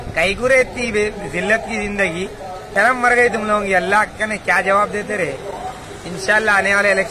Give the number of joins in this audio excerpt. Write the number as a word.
one